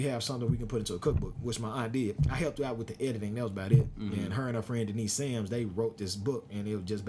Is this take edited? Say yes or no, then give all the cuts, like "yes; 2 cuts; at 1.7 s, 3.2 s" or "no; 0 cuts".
no; 0 cuts